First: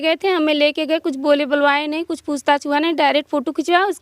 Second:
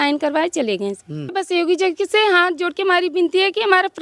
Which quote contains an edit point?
second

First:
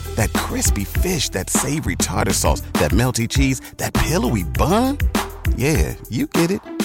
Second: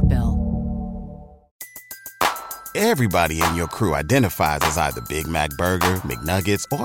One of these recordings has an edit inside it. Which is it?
second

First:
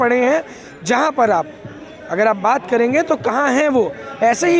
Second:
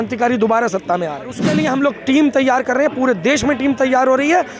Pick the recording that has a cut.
second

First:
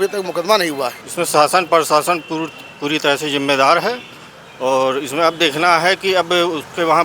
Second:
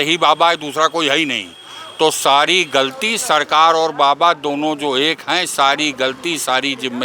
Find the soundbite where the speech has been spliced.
first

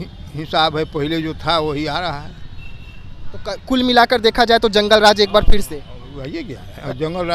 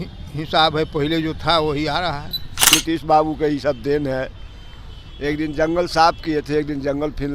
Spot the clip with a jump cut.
second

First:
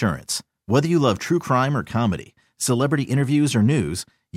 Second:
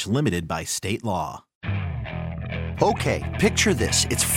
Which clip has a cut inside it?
second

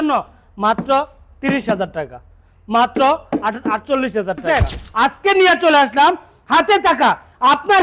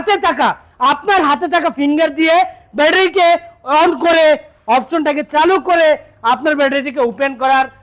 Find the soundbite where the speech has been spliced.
first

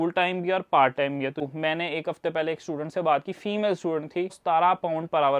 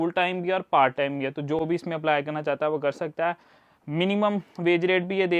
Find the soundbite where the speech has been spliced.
first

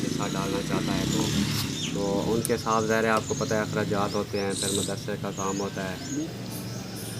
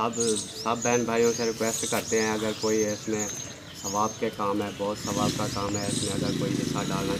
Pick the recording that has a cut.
first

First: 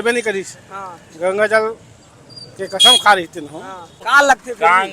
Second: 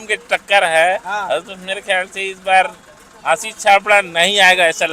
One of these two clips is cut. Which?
first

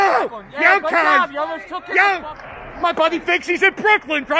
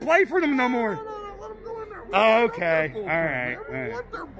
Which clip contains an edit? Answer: first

